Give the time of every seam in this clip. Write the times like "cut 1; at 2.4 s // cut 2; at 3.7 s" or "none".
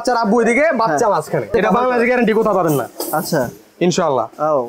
cut 1; at 1.5 s